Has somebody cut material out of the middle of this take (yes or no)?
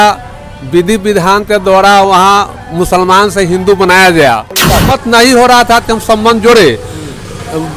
yes